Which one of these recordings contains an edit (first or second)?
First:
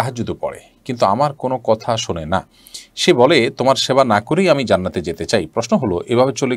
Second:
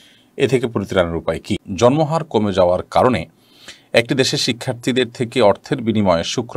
second